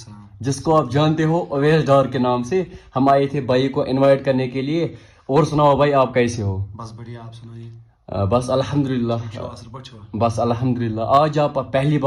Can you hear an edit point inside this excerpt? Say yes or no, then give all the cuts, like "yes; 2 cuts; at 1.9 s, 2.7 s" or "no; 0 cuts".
no; 0 cuts